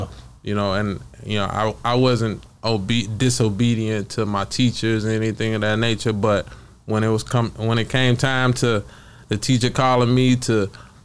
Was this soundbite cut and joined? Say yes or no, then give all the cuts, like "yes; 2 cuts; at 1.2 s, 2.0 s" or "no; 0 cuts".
no; 0 cuts